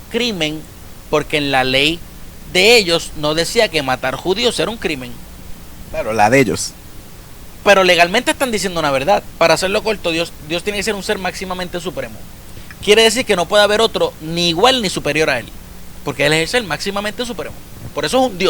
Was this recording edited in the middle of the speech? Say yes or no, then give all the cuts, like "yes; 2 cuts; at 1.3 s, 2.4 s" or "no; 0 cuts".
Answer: yes; 1 cut; at 9.3 s